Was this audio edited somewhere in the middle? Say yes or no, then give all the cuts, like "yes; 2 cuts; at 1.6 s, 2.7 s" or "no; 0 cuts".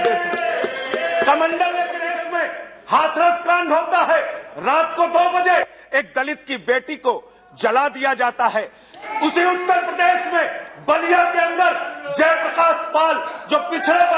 yes; 1 cut; at 2.2 s